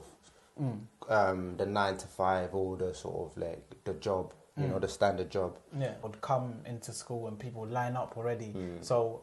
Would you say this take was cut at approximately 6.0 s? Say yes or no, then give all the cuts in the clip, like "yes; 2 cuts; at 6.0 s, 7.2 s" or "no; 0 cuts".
yes; 1 cut; at 6.0 s